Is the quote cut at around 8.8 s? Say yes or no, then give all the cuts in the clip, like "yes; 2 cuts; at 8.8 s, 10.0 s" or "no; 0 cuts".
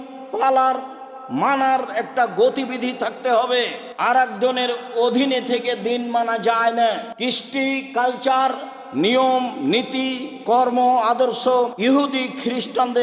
no; 3 cuts; at 3.8 s, 7.1 s, 11.7 s